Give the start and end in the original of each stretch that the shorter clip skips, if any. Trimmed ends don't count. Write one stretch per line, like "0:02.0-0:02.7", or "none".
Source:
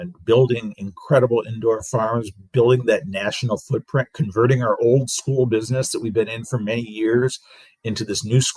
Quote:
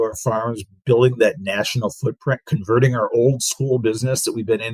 none